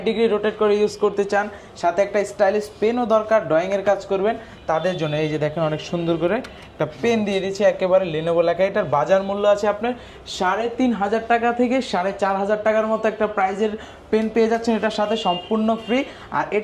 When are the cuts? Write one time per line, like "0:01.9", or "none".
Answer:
none